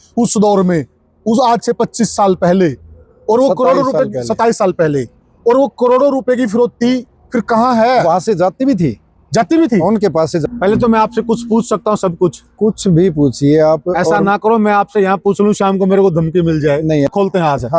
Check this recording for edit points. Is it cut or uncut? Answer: cut